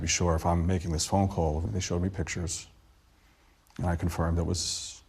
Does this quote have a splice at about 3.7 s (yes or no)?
no